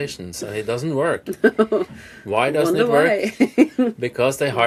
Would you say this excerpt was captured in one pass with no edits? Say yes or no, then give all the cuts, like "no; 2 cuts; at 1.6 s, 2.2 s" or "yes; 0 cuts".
yes; 0 cuts